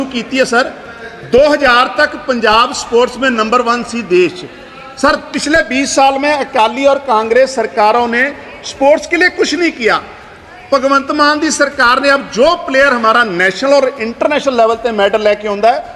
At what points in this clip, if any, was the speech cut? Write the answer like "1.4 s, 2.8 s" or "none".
none